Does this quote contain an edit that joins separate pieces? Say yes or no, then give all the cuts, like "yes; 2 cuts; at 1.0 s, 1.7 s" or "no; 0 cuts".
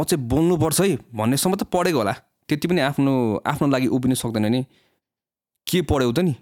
yes; 1 cut; at 2.3 s